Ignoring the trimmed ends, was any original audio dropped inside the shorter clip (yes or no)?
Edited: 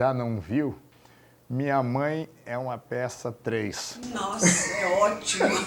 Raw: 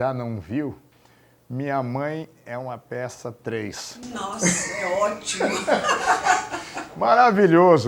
no